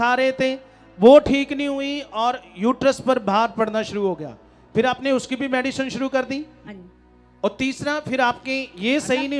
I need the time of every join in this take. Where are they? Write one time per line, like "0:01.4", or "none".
0:06.6